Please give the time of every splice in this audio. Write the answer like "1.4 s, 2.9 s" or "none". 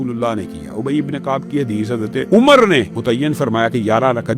2.3 s, 2.9 s